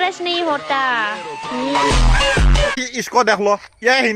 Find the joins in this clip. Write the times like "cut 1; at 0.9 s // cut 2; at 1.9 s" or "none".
cut 1; at 2.8 s